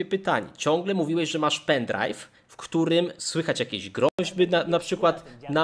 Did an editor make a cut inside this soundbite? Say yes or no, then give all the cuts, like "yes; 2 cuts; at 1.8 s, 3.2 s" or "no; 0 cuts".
no; 0 cuts